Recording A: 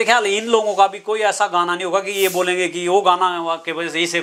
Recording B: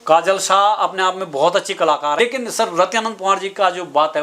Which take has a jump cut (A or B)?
B